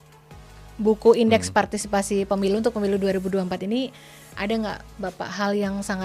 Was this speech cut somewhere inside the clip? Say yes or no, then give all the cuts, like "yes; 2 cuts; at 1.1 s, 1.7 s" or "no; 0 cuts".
no; 0 cuts